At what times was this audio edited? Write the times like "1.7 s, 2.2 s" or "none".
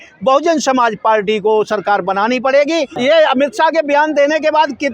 2.9 s